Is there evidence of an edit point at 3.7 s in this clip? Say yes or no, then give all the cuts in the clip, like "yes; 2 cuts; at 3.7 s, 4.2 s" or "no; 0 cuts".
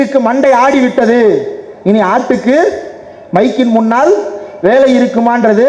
no; 0 cuts